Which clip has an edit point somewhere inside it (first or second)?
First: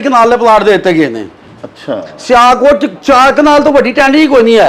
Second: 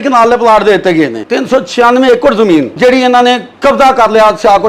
second